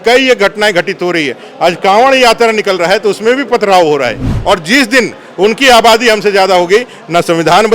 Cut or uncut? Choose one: cut